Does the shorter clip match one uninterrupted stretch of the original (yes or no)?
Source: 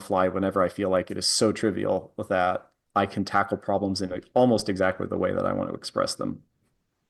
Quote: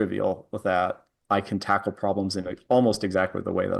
yes